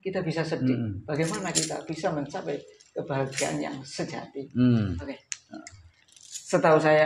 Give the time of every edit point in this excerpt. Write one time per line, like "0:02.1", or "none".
0:05.1